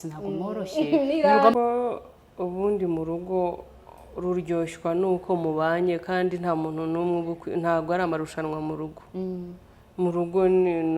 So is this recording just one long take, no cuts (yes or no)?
no